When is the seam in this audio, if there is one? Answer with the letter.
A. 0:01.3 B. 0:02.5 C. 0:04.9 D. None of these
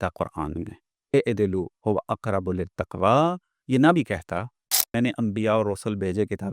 C